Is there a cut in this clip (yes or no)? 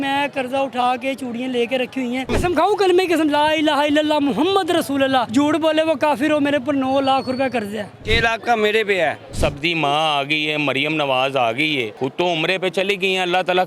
yes